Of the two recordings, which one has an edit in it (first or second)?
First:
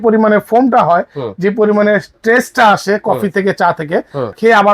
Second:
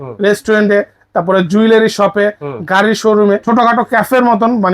second